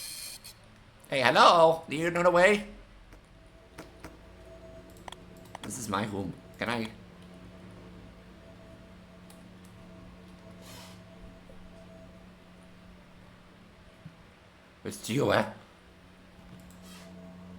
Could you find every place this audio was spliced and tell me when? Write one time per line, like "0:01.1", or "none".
0:03.4